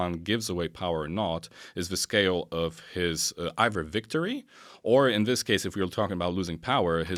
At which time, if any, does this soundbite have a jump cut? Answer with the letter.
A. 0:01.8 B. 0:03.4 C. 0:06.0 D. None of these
D